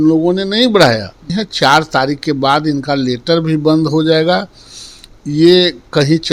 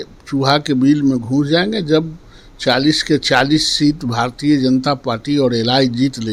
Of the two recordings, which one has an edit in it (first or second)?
first